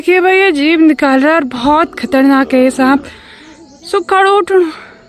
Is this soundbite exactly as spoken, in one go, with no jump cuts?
yes; 0 cuts

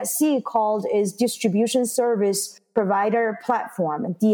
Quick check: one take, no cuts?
yes; 0 cuts

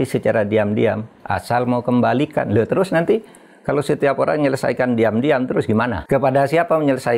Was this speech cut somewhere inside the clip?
yes; 1 cut; at 6.0 s

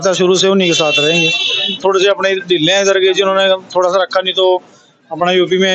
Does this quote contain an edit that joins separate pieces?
yes; 1 cut; at 1.8 s

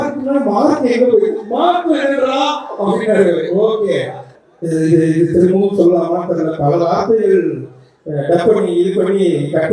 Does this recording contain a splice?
yes; 1 cut; at 4.2 s

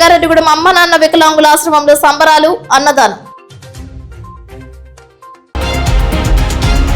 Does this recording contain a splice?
yes; 1 cut; at 5.6 s

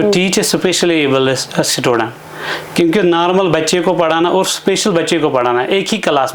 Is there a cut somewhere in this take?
no; 0 cuts

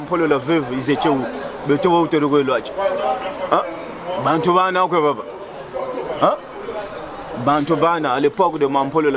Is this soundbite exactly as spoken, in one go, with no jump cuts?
yes; 0 cuts

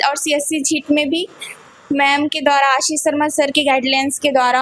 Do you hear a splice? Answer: no; 0 cuts

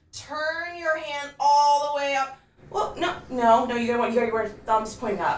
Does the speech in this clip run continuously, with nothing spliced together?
yes; 0 cuts

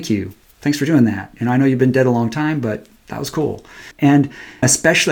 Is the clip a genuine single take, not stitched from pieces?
no; 1 cut; at 3.9 s

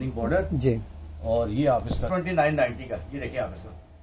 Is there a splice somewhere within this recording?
yes; 1 cut; at 2.1 s

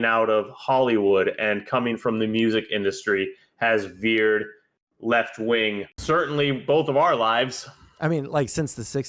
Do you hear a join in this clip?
yes; 1 cut; at 6.0 s

